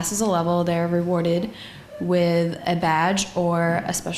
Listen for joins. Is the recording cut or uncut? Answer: uncut